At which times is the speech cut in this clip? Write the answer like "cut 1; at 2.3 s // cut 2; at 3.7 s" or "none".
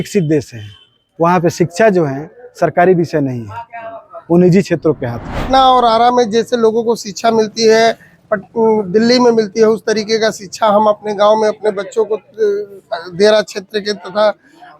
cut 1; at 5.4 s